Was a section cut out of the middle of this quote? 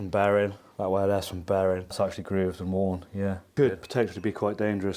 yes; 2 cuts; at 1.9 s, 3.5 s

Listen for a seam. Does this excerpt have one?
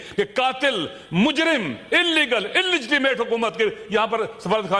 no; 0 cuts

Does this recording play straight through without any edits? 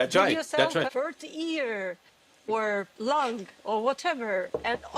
no; 2 cuts; at 0.9 s, 2.5 s

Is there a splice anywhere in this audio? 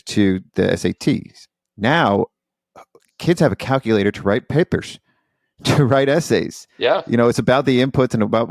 yes; 1 cut; at 1.6 s

